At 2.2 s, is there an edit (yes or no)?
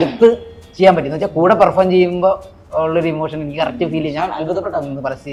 no